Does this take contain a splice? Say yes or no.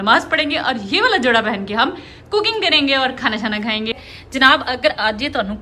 yes